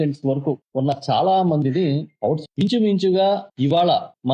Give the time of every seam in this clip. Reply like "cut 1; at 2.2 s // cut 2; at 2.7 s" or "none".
cut 1; at 2.4 s

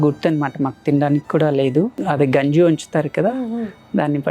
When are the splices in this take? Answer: cut 1; at 2.0 s

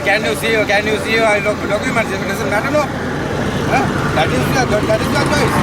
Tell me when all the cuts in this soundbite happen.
none

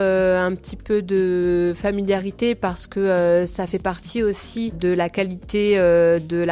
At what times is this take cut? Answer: none

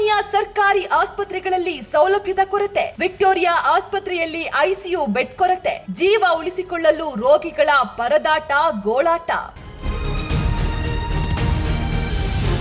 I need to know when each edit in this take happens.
none

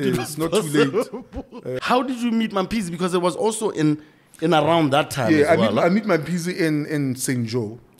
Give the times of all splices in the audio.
cut 1; at 1.7 s

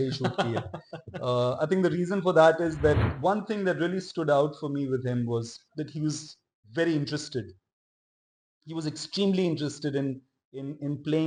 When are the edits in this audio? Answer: cut 1; at 3.0 s

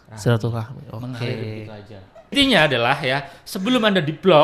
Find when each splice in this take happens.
cut 1; at 2.3 s

